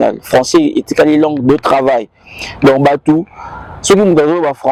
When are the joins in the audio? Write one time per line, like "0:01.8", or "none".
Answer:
none